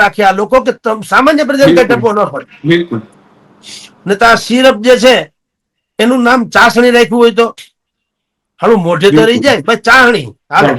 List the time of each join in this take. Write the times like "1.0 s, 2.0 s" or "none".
none